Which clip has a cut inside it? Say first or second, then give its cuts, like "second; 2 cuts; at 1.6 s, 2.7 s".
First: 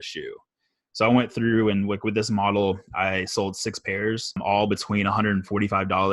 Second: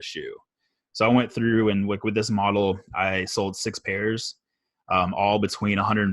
first; 1 cut; at 4.4 s